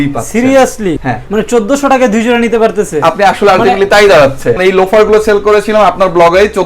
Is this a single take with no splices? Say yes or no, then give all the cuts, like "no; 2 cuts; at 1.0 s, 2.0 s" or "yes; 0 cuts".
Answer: no; 2 cuts; at 1.1 s, 4.6 s